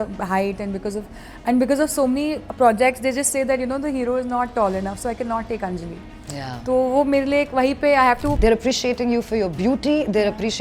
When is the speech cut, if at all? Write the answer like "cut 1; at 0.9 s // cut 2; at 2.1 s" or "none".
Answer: cut 1; at 8.4 s